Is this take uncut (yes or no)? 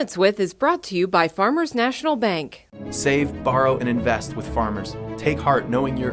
yes